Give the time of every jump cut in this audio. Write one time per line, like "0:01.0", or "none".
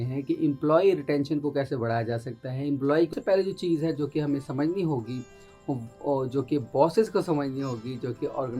0:03.1